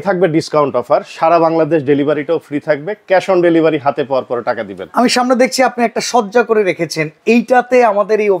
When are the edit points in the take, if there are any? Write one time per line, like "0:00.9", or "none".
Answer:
none